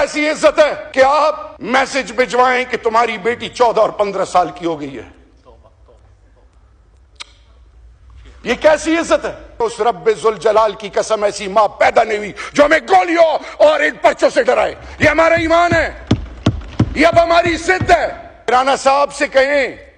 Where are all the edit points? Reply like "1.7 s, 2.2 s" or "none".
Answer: 0.8 s, 1.5 s, 9.6 s, 18.5 s